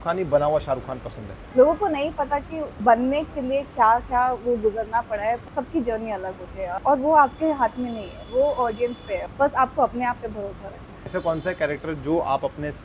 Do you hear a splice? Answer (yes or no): yes